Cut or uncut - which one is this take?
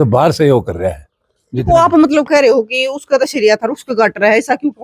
uncut